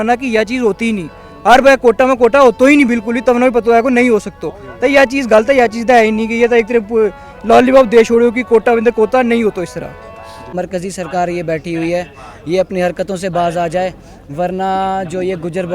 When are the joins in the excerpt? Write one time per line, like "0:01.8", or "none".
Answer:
0:10.5